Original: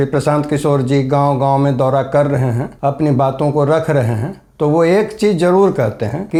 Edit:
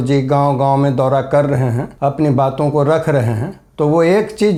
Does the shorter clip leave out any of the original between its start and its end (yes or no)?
no